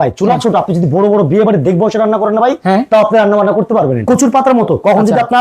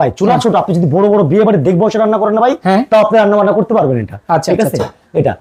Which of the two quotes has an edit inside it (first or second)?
first